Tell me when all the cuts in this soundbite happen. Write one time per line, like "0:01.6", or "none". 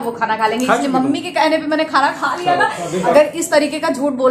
0:03.1